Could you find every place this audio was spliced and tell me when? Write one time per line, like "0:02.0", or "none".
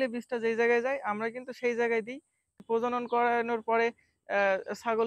0:02.5